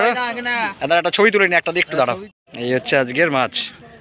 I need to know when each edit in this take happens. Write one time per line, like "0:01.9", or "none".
0:02.5